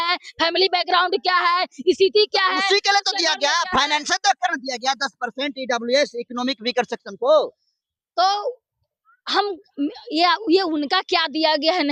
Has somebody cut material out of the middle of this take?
no; 0 cuts

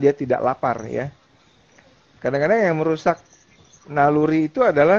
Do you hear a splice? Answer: no; 0 cuts

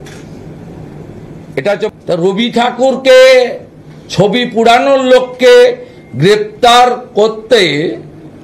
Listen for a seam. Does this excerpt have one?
yes; 1 cut; at 1.9 s

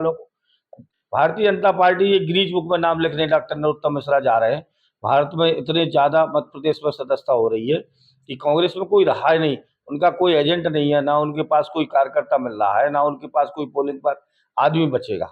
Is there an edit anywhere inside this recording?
yes; 1 cut; at 0.9 s

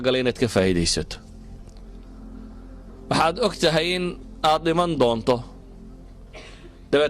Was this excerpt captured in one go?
no; 2 cuts; at 1.3 s, 2.6 s

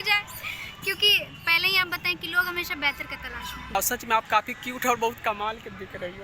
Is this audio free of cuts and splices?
no; 1 cut; at 3.8 s

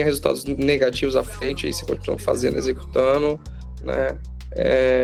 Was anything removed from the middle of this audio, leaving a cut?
no; 0 cuts

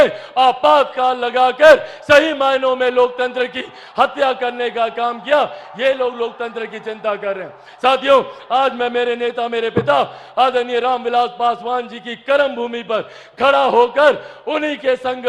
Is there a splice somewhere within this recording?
no; 0 cuts

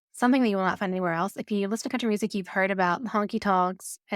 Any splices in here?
no; 0 cuts

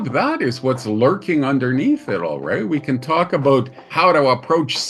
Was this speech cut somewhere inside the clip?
yes; 1 cut; at 3.8 s

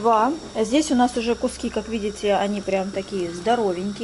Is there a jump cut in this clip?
no; 0 cuts

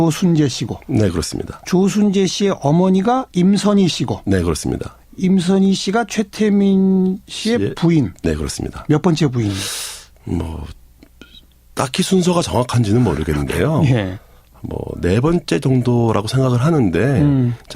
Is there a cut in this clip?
yes; 1 cut; at 4.4 s

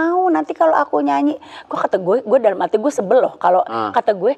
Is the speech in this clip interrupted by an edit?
no; 0 cuts

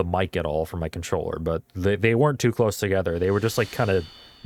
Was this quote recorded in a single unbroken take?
yes; 0 cuts

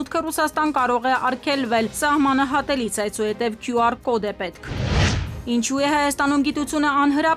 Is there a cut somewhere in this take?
yes; 1 cut; at 5.3 s

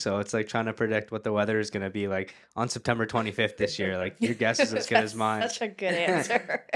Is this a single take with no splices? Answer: yes; 0 cuts

